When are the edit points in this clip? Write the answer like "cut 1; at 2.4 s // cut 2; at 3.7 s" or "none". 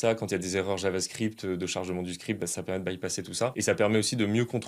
cut 1; at 3.5 s